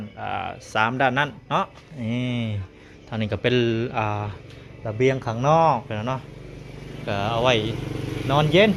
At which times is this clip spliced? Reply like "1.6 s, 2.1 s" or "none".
none